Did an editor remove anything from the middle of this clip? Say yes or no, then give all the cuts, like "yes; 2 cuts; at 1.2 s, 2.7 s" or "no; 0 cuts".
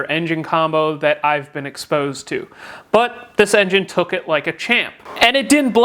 yes; 1 cut; at 4.9 s